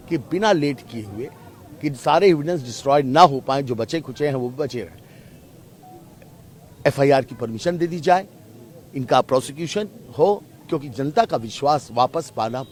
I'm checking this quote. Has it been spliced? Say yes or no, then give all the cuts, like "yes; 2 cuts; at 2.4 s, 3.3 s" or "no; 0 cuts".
no; 0 cuts